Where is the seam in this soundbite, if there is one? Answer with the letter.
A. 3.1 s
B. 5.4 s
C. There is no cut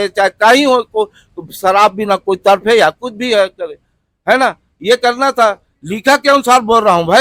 C